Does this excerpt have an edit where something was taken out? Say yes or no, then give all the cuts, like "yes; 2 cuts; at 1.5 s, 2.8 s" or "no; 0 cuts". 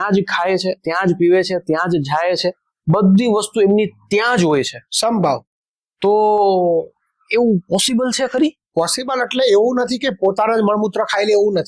no; 0 cuts